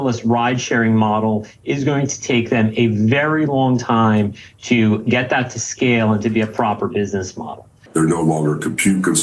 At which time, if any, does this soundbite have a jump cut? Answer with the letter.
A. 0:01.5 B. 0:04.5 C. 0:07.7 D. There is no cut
C